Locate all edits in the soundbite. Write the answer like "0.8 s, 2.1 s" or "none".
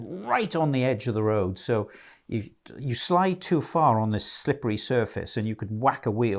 none